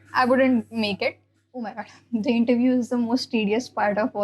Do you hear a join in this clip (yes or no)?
yes